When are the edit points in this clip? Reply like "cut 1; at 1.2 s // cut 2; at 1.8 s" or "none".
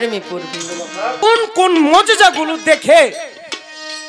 cut 1; at 1.2 s